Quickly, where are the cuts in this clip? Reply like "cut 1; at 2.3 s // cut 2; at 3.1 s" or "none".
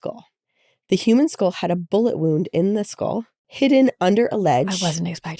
none